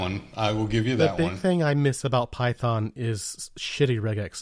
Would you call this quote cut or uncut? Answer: uncut